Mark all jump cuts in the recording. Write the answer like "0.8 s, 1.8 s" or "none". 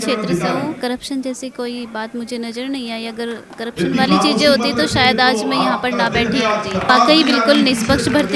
0.8 s, 6.9 s